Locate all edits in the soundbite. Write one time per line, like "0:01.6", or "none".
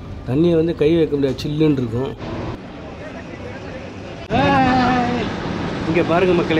0:02.5